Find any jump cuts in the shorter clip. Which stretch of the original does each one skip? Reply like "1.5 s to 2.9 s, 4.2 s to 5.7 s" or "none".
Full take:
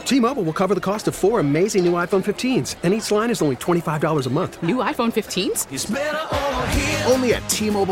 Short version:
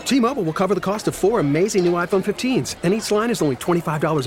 none